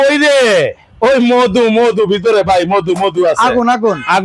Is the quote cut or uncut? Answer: uncut